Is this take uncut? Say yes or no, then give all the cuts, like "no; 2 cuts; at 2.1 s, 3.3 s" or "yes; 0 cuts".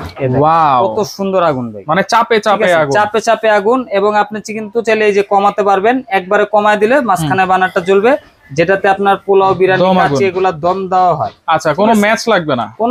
yes; 0 cuts